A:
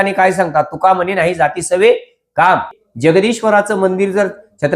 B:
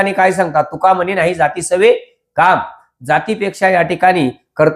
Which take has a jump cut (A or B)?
A